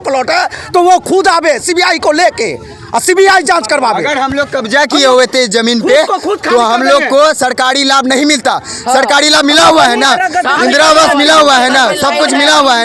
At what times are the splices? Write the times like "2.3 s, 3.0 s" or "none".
none